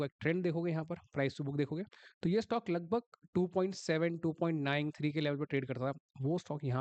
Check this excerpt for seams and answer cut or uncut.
uncut